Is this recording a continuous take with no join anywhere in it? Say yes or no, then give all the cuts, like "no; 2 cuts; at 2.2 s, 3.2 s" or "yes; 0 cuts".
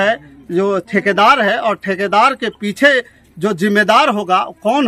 yes; 0 cuts